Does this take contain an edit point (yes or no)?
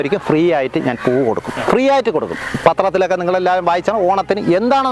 yes